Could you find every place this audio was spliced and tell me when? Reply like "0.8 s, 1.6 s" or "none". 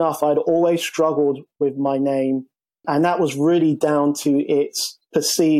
2.9 s